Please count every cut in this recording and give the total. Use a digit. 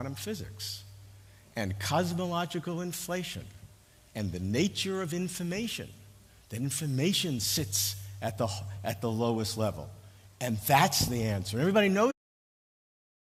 0